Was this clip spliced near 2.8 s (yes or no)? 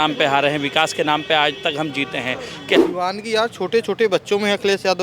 yes